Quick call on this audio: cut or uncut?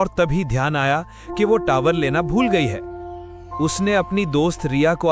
uncut